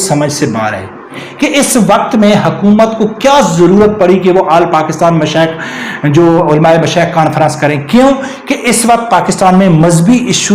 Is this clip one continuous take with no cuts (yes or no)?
no